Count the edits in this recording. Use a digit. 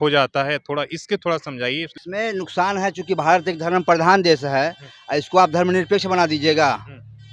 1